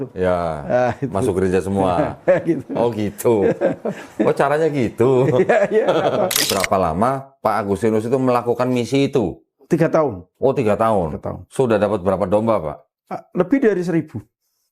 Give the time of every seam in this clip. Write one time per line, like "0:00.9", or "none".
0:06.6